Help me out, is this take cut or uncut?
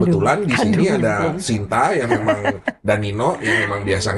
uncut